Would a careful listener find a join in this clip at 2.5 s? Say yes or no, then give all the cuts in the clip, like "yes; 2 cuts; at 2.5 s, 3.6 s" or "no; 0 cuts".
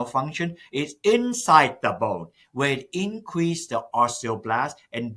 no; 0 cuts